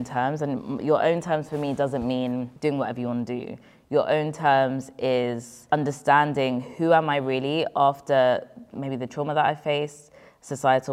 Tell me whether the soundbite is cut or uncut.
cut